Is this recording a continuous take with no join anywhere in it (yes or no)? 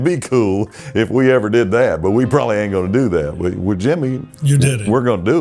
yes